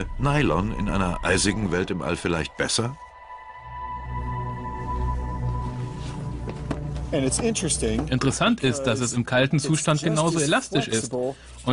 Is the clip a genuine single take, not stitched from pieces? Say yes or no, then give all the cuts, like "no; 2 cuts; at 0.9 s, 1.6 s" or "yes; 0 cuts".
yes; 0 cuts